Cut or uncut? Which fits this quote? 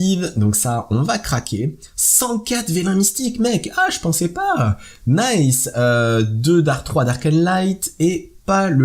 uncut